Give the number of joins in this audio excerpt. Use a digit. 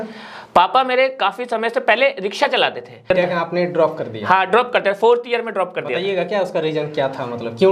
1